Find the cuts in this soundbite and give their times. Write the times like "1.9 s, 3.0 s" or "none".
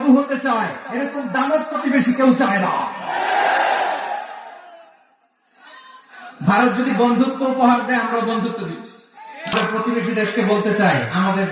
9.5 s